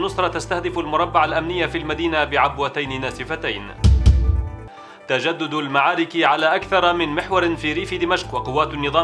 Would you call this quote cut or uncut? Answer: uncut